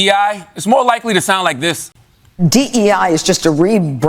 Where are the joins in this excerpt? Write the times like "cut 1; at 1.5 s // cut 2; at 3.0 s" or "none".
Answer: cut 1; at 2.3 s